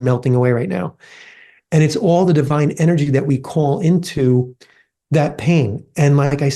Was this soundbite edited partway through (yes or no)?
no